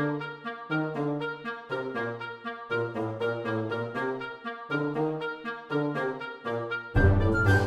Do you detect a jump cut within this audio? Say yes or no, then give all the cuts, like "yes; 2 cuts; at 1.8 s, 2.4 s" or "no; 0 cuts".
yes; 1 cut; at 2.7 s